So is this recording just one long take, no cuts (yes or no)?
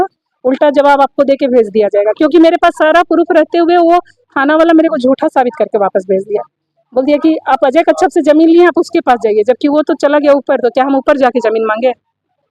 yes